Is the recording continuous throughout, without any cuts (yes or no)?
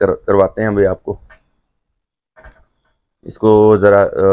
yes